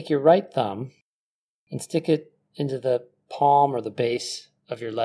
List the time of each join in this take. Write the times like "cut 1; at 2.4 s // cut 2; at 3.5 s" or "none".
none